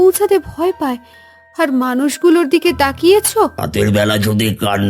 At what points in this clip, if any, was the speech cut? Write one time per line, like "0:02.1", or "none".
0:03.6